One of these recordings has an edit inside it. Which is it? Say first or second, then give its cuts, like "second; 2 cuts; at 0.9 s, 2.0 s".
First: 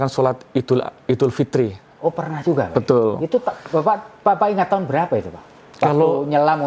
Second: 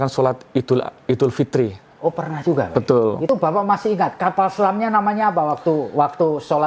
second; 1 cut; at 3.3 s